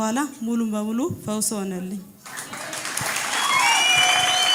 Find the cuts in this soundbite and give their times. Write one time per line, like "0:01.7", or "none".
none